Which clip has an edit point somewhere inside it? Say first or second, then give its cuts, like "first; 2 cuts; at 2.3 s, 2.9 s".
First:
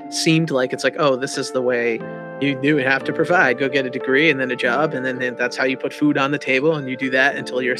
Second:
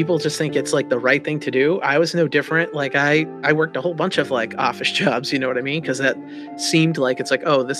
first; 2 cuts; at 2.3 s, 4.0 s